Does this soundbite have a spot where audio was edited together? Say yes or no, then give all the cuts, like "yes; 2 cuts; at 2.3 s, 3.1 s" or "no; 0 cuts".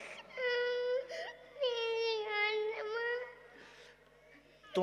no; 0 cuts